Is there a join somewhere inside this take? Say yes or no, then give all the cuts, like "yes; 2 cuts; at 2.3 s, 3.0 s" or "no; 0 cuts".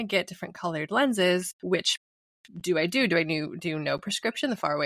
yes; 1 cut; at 1.5 s